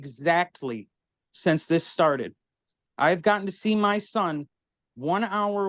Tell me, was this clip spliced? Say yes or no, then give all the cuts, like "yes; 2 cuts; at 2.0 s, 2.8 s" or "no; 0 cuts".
no; 0 cuts